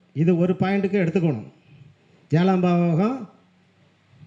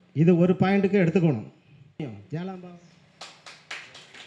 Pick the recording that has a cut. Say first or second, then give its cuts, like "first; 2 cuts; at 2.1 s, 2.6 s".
second; 1 cut; at 2.7 s